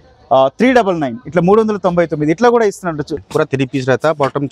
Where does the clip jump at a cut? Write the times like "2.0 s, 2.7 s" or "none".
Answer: 3.2 s